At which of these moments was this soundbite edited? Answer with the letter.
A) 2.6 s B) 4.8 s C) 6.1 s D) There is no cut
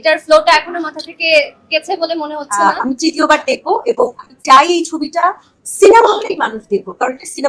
A